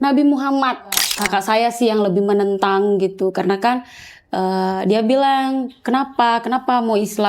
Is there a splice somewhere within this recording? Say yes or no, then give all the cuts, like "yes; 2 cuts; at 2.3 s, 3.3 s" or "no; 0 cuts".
yes; 1 cut; at 1.1 s